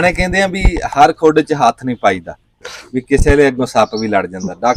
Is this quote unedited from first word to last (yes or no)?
yes